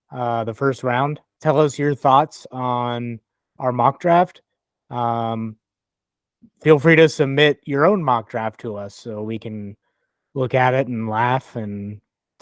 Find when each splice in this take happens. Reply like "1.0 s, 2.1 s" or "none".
1.3 s